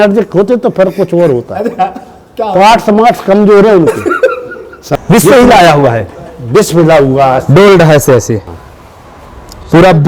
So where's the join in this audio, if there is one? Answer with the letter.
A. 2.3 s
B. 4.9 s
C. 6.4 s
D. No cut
B